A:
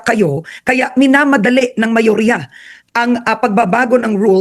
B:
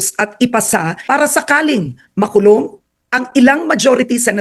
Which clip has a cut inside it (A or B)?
B